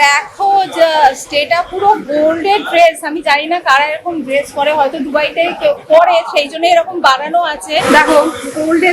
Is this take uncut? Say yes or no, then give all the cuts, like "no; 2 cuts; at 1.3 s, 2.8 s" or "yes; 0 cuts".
no; 1 cut; at 7.8 s